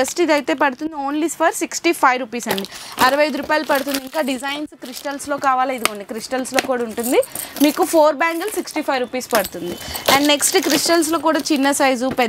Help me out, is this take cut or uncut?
uncut